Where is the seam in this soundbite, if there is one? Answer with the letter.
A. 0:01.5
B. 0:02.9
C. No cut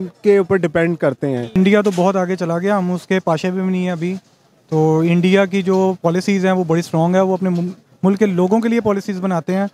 A